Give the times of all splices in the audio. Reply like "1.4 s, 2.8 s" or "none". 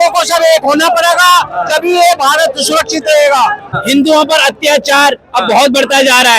3.7 s